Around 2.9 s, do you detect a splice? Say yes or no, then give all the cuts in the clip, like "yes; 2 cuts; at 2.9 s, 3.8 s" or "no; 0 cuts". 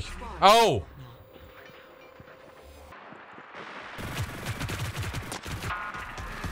yes; 1 cut; at 2.9 s